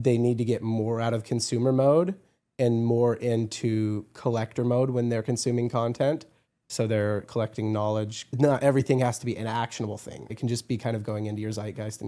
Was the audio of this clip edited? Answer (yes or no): yes